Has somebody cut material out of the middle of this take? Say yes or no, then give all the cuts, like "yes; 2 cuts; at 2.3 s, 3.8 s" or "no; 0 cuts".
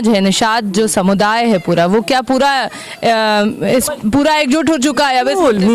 no; 0 cuts